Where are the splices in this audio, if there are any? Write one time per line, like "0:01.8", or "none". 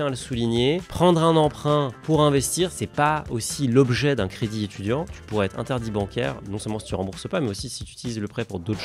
0:02.8
0:05.1